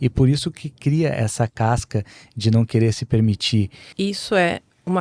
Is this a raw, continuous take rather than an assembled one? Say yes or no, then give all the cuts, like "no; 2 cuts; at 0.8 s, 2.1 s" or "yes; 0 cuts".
no; 1 cut; at 3.8 s